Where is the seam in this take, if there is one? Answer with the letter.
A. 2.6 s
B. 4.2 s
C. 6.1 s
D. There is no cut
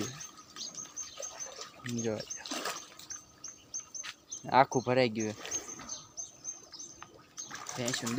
D